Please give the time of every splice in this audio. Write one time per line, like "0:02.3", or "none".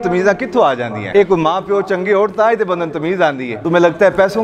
0:01.0
0:03.5

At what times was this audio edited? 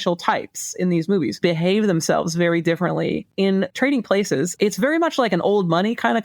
0:01.4
0:03.5
0:04.5

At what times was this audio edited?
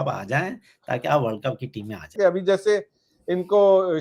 0:02.1

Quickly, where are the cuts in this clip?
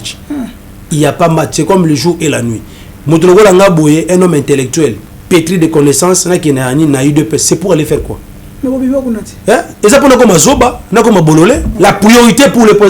0:05.1
0:11.7

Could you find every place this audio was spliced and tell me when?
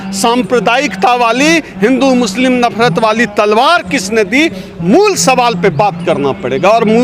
none

